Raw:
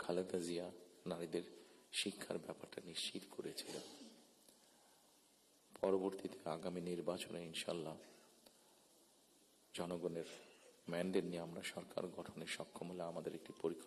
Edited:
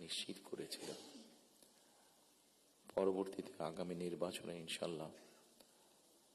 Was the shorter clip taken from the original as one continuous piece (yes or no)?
yes